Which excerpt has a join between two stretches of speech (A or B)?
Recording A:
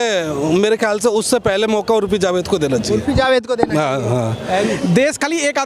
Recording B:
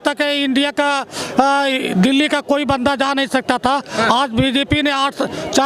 A